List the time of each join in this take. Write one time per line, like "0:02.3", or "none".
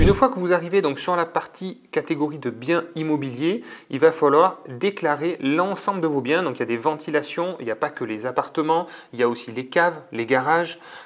none

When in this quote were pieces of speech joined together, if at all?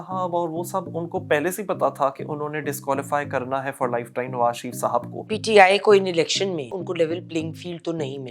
0:05.4
0:06.7

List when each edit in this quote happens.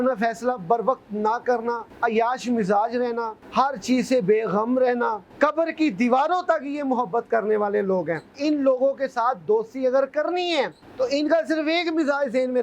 0:01.9
0:03.4
0:05.2
0:08.3
0:10.8

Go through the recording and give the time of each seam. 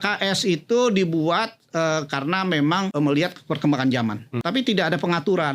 0:02.9
0:04.3

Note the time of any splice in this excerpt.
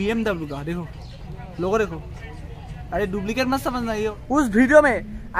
0:04.1

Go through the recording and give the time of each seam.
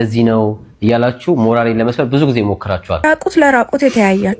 0:02.9

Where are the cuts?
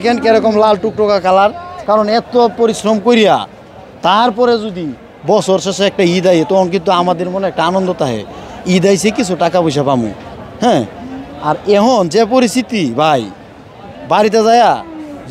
0:01.7

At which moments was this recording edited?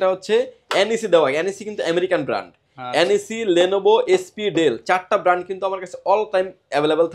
none

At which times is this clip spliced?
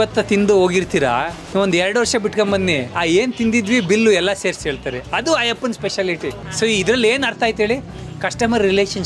0:02.9
0:06.5

